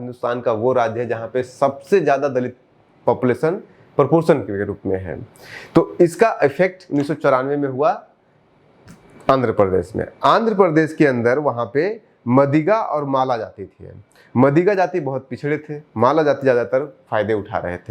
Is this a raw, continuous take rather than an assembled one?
yes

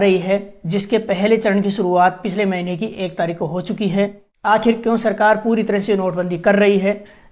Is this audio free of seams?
no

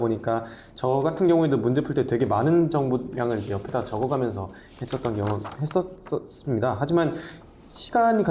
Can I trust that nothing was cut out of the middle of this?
yes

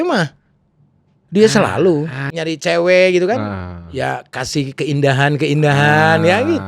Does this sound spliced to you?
yes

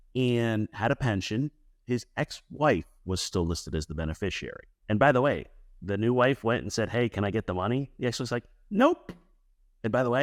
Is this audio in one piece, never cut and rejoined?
yes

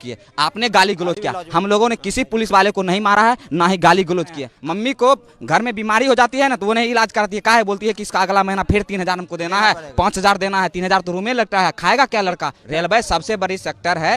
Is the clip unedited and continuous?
no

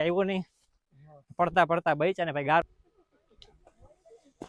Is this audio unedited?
no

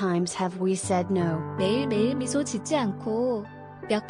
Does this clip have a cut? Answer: no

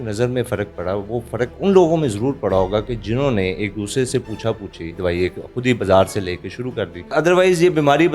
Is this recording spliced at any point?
yes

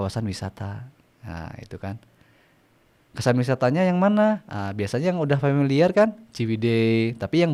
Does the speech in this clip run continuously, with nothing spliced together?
yes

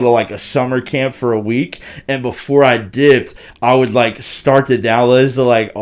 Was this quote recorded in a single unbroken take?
yes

